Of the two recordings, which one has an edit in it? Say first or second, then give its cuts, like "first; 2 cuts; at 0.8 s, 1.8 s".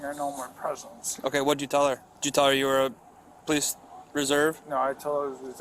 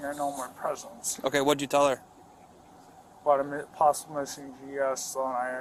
first; 2 cuts; at 2.1 s, 4.6 s